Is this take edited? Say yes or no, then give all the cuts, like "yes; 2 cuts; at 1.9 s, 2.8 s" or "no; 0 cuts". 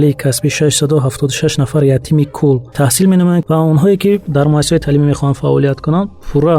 yes; 2 cuts; at 2.7 s, 3.4 s